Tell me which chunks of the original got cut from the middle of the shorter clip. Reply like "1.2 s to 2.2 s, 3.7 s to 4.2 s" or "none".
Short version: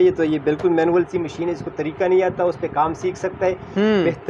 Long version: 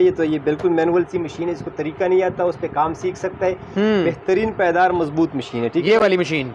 none